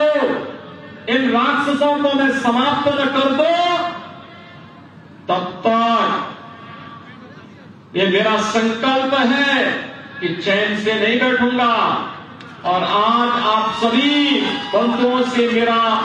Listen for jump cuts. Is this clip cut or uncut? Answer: uncut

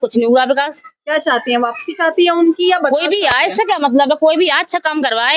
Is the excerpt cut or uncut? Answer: uncut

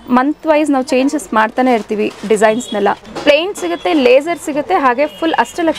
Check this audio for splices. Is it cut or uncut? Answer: cut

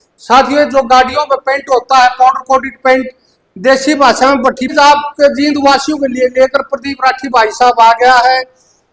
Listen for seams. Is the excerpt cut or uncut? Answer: cut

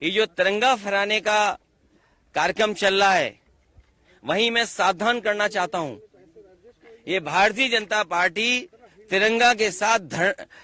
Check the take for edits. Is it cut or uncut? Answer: uncut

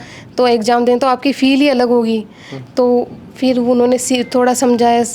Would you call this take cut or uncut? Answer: uncut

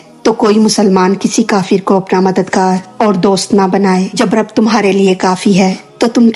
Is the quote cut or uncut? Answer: cut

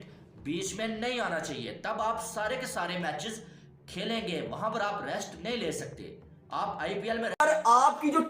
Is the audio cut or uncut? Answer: cut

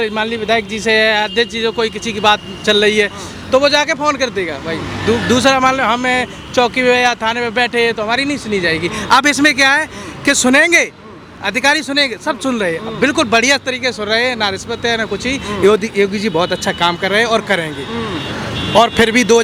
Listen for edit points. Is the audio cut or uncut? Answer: uncut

